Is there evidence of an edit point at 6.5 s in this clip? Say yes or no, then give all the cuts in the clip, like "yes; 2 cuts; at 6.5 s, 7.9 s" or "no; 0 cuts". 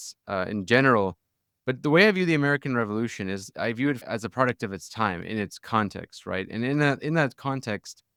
no; 0 cuts